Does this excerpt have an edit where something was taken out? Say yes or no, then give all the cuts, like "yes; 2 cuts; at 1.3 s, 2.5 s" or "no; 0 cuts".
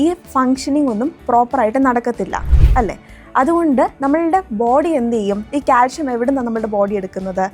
no; 0 cuts